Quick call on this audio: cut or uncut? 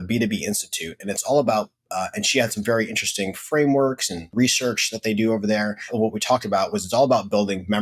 cut